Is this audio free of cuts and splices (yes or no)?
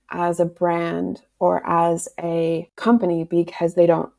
no